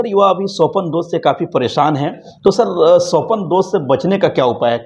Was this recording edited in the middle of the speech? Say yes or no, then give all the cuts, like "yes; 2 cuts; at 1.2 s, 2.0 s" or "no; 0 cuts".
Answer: no; 0 cuts